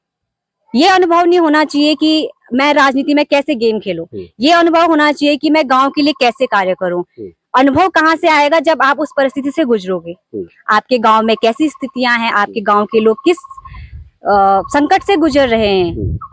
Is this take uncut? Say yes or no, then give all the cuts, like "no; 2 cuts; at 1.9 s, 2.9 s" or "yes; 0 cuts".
yes; 0 cuts